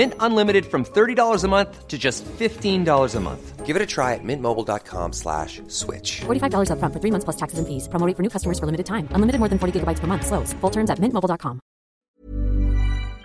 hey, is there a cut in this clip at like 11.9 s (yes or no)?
yes